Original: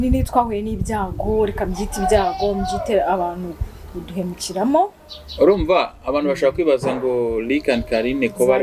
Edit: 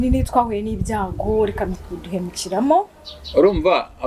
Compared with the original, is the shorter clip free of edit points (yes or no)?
no